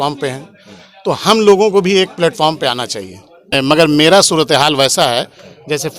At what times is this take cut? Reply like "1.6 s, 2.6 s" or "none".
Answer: 3.5 s